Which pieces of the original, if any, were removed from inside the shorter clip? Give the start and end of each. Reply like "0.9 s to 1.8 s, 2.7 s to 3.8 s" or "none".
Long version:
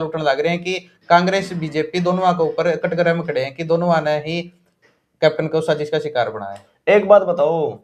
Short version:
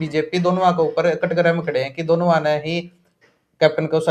none